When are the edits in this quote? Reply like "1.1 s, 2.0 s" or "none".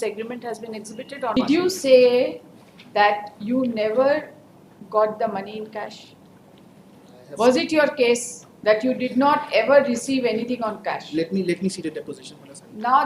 1.4 s